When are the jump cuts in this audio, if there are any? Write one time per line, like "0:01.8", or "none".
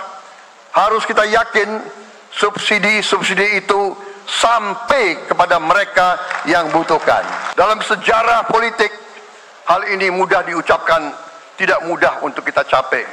0:07.4